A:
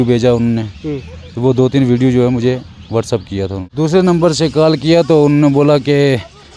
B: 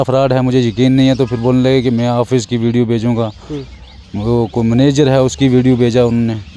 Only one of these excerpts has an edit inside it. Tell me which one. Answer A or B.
A